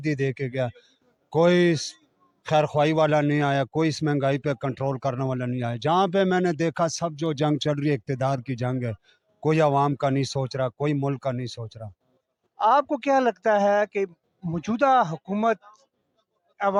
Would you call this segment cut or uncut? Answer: uncut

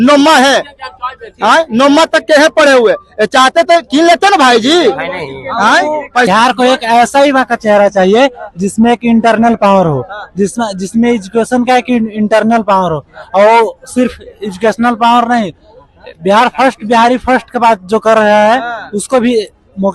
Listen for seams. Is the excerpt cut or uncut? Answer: cut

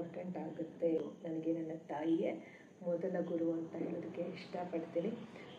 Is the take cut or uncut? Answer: cut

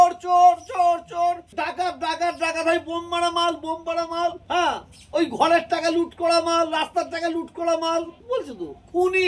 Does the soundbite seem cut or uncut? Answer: cut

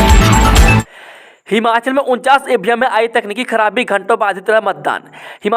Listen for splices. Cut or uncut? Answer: cut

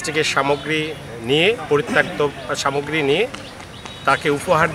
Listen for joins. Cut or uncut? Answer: uncut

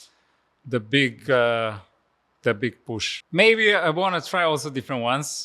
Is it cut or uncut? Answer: cut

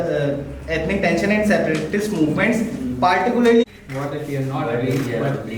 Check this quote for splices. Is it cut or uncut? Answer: cut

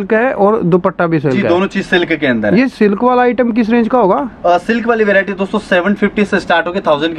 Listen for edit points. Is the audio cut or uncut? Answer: uncut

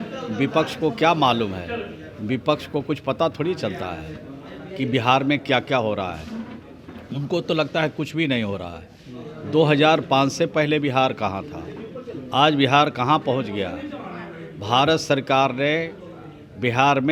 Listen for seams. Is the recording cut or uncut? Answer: uncut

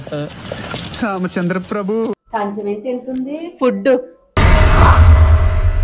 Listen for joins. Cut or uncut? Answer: cut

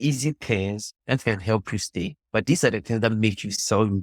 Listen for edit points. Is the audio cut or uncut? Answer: uncut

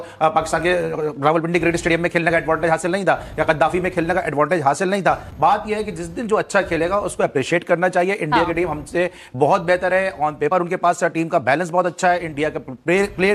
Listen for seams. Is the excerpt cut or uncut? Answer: uncut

